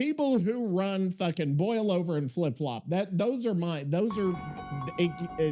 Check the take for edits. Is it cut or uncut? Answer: uncut